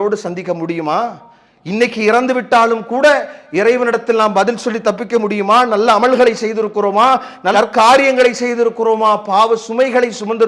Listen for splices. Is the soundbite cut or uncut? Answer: uncut